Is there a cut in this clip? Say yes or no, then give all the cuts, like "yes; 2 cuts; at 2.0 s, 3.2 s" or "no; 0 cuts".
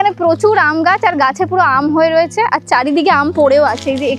no; 0 cuts